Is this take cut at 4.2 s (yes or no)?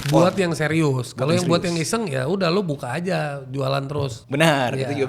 yes